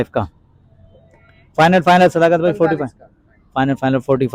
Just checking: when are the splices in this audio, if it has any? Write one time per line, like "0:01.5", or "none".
none